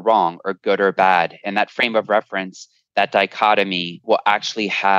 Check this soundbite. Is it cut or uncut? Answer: cut